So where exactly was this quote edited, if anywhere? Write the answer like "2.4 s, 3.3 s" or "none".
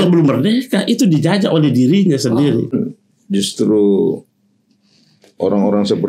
2.7 s